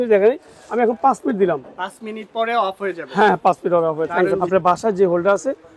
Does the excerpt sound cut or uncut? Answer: cut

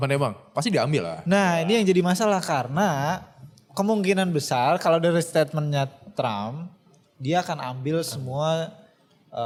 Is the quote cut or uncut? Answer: uncut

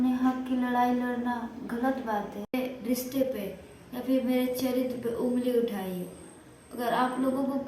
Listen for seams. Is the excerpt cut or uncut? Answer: cut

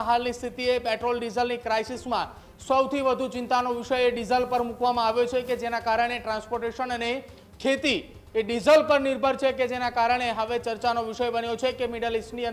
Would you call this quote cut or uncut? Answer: uncut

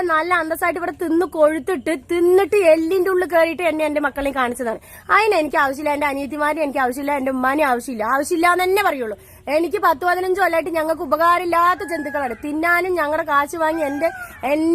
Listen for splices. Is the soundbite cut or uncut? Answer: uncut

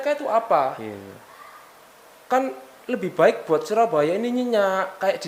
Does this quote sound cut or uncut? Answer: uncut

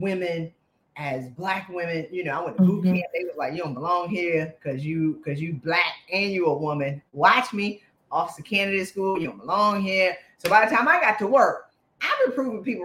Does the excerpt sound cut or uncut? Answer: uncut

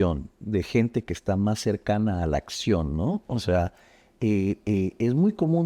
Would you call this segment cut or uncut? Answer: uncut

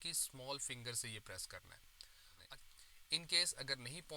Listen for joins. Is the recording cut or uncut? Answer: cut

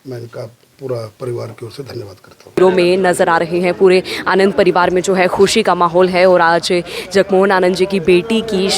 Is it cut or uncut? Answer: cut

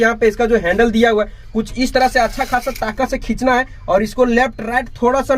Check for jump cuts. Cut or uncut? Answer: uncut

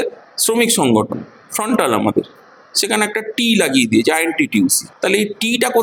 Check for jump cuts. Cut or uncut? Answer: uncut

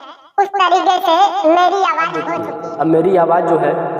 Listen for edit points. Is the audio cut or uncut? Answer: cut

